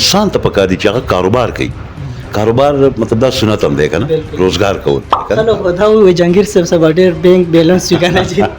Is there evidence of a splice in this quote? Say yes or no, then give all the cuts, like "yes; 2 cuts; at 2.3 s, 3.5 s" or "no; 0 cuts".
yes; 1 cut; at 5.3 s